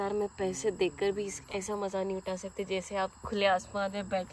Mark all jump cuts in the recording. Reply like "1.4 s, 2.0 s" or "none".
none

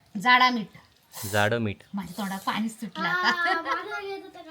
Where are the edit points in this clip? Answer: none

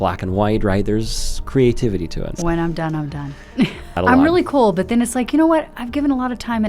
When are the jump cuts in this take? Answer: 2.3 s, 4.0 s

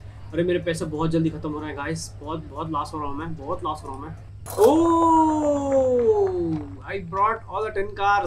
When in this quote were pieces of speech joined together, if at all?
4.5 s

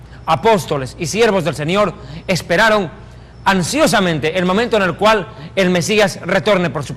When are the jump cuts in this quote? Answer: 2.0 s

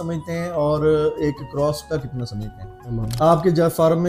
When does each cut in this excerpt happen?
3.0 s

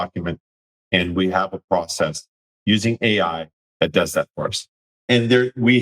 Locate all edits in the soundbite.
4.8 s

